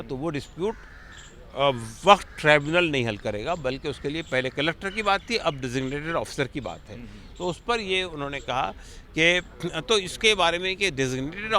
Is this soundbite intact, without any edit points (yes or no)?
yes